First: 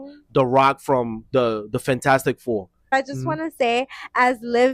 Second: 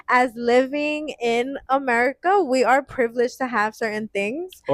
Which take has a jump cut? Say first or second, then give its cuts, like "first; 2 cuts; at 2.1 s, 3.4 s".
first; 1 cut; at 2.9 s